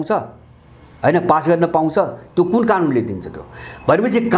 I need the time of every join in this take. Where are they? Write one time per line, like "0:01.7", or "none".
none